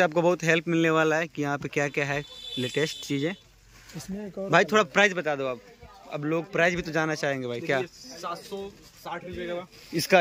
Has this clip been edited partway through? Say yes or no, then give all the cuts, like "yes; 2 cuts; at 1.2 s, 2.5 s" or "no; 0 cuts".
no; 0 cuts